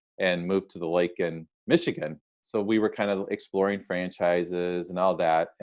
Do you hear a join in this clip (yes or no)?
yes